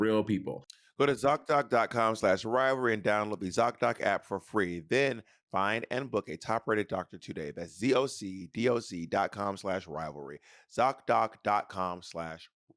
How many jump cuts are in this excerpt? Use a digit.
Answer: 0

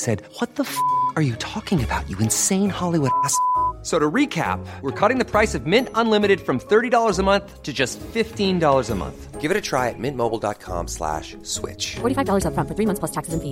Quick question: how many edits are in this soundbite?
0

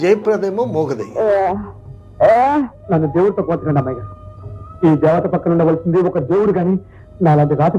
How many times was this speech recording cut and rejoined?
1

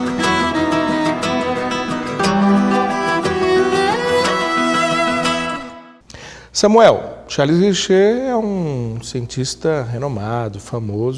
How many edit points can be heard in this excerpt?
0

